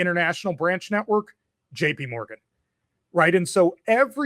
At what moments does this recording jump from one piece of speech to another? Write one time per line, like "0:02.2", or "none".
none